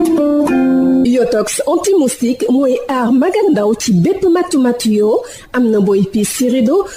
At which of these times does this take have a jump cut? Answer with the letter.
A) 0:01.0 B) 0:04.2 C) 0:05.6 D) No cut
A